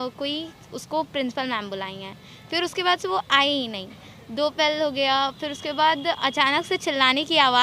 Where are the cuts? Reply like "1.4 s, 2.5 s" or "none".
none